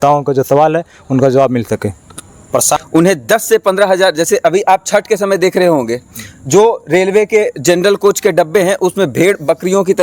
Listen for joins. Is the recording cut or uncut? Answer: cut